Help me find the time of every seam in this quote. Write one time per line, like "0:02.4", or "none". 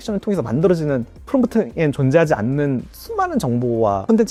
none